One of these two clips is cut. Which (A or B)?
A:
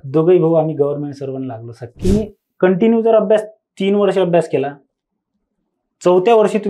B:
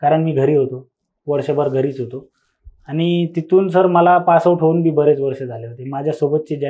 A